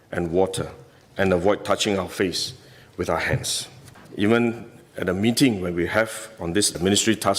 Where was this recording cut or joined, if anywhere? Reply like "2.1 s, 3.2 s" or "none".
4.0 s